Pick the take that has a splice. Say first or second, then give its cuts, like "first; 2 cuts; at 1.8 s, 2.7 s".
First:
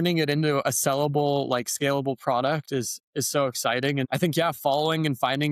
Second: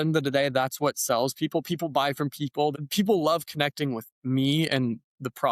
second; 2 cuts; at 2.7 s, 4.1 s